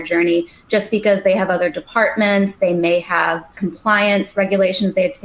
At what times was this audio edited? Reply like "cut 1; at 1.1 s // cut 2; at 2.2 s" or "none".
cut 1; at 3.5 s